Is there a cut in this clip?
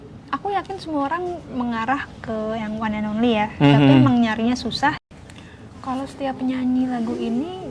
yes; 1 cut; at 5.0 s

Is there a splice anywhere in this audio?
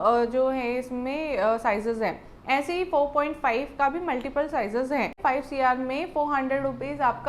yes; 1 cut; at 5.2 s

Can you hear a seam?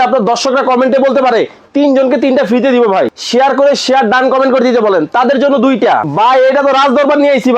yes; 2 cuts; at 3.2 s, 6.1 s

